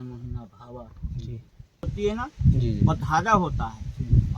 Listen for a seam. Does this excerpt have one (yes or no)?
yes